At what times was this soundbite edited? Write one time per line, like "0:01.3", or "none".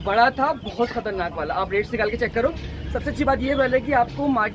none